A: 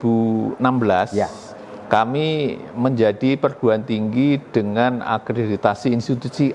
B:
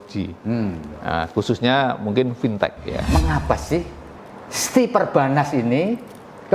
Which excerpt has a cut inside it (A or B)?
B